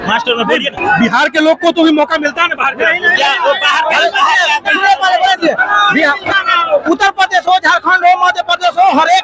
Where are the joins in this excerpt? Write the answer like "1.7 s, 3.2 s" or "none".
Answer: none